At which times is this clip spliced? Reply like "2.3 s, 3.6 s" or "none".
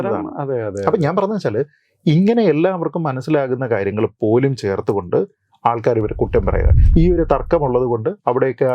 6.7 s